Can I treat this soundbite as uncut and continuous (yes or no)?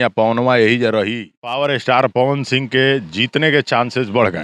no